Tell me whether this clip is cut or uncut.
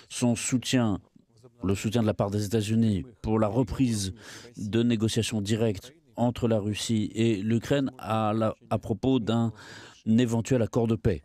uncut